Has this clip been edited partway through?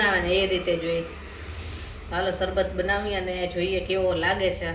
no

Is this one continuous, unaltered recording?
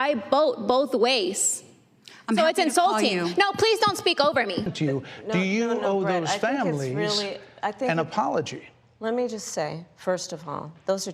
no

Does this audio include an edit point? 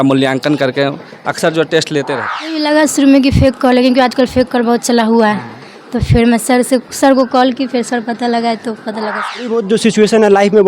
yes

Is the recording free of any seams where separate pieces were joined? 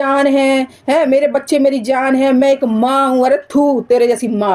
yes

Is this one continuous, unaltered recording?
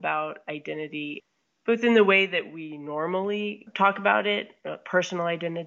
no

